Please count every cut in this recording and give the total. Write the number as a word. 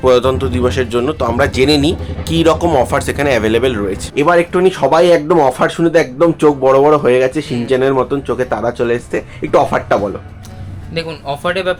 zero